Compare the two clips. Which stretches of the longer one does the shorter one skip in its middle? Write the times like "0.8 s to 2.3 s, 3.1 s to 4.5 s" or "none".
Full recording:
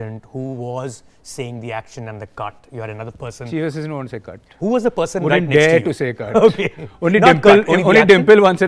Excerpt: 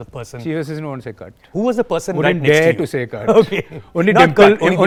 none